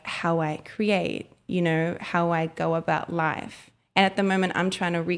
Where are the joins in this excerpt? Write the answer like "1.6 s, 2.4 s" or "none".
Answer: none